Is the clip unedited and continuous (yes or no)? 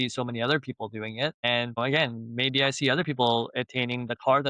no